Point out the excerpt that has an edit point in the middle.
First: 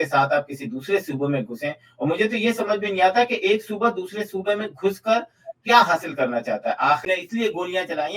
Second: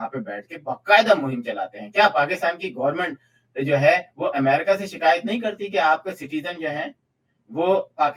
first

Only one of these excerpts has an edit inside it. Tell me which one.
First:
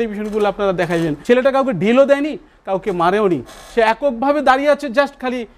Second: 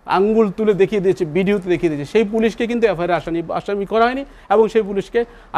first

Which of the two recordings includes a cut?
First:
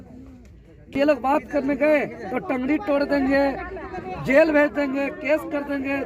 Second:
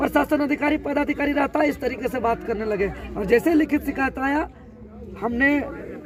first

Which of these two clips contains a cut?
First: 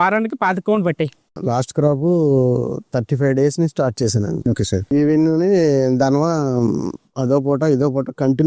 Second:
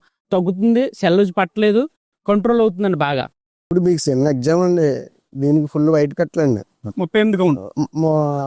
first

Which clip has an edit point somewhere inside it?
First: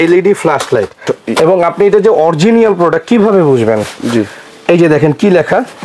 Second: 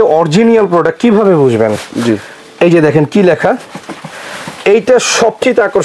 first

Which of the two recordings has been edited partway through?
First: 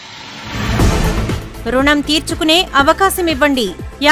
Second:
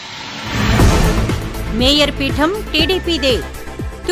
first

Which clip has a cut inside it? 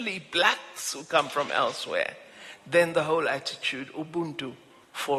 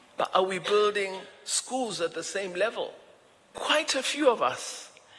second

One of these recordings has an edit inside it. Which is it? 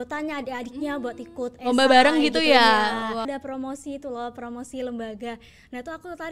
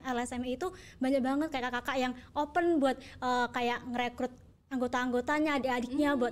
first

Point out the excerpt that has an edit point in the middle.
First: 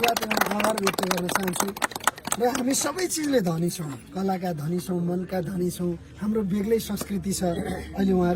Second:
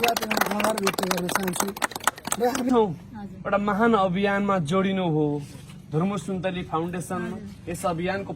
second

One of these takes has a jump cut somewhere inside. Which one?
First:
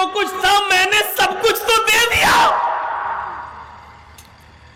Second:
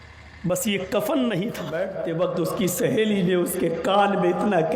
second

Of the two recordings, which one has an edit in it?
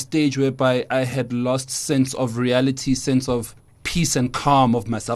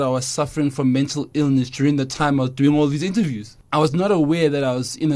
second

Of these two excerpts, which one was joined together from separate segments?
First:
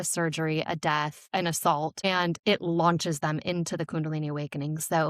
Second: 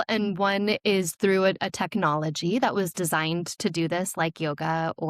first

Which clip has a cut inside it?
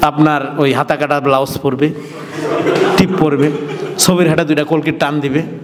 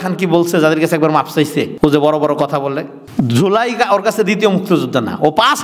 second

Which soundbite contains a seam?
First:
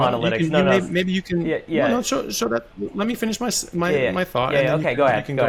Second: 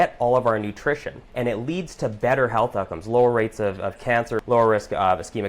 second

